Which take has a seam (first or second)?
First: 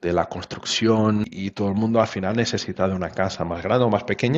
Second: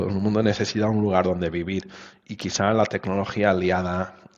first